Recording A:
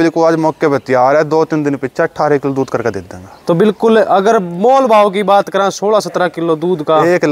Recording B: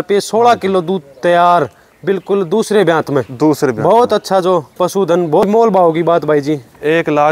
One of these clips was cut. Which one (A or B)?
B